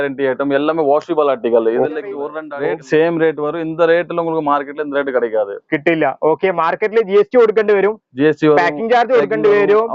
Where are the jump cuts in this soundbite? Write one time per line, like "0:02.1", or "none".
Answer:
0:02.3